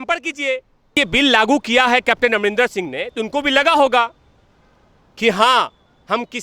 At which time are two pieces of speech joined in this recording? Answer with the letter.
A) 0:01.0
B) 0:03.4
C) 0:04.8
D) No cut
A